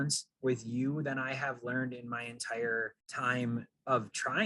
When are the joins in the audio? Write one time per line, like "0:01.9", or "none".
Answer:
0:03.0